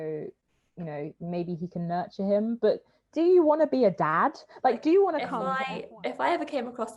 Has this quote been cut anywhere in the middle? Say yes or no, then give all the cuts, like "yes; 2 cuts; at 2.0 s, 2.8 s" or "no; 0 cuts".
yes; 1 cut; at 5.4 s